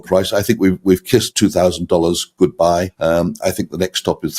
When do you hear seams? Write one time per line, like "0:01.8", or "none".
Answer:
0:01.3
0:02.9